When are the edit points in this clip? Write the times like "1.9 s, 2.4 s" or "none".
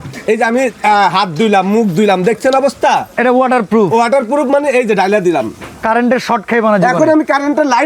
none